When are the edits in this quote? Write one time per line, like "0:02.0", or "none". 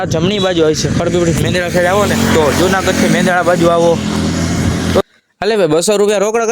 0:05.0